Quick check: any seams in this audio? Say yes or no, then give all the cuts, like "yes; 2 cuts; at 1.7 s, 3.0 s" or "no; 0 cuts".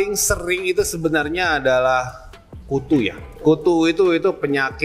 yes; 1 cut; at 3.3 s